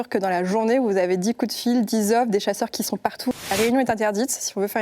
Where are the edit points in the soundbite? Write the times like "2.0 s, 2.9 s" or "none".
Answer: 3.4 s